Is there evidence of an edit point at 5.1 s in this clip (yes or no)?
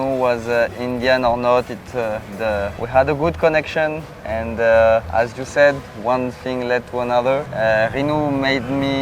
yes